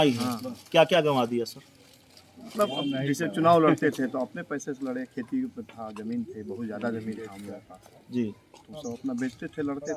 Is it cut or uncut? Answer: uncut